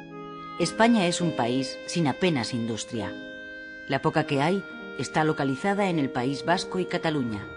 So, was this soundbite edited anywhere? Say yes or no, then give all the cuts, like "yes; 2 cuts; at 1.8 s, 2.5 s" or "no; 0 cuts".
yes; 1 cut; at 2.6 s